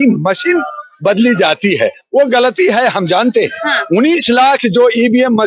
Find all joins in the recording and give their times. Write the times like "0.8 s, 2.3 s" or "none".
none